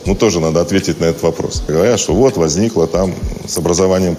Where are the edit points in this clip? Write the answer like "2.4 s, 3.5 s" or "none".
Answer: 1.7 s